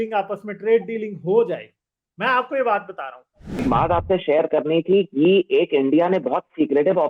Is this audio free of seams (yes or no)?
no